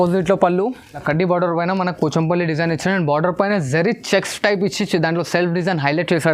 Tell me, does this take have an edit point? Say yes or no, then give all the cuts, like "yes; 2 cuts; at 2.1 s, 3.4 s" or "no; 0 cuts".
yes; 1 cut; at 1.0 s